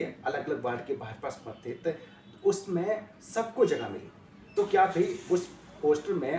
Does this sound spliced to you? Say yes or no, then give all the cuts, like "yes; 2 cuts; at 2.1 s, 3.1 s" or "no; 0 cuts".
no; 0 cuts